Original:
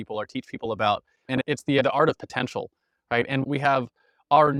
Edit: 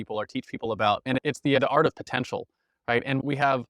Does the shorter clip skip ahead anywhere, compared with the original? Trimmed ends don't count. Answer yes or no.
yes